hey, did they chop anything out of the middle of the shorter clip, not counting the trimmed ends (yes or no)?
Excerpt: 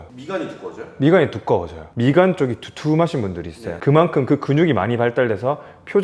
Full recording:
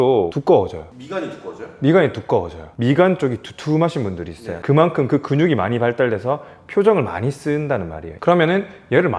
no